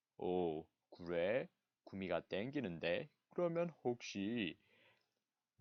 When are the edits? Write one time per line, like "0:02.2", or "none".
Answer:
none